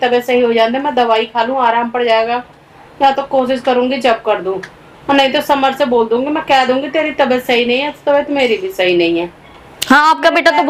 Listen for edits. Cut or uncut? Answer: uncut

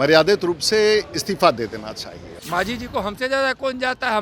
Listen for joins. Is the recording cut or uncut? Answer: cut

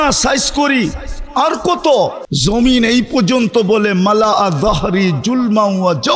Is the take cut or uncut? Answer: cut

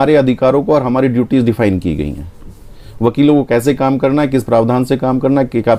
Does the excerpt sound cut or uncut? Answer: uncut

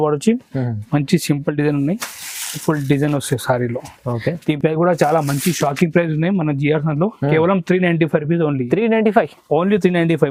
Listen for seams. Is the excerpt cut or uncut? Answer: uncut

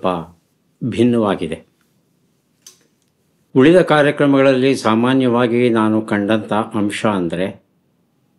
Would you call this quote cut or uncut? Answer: uncut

